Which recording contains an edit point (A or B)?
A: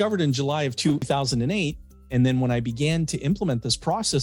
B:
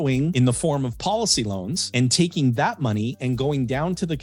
A